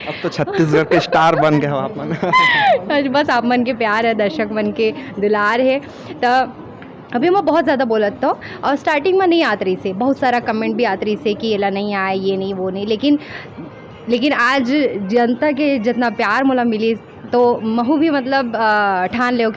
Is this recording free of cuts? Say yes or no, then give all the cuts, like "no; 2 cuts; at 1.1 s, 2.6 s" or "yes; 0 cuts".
yes; 0 cuts